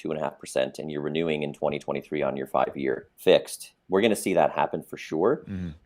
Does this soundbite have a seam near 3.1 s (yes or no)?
yes